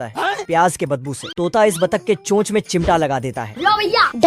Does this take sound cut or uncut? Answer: cut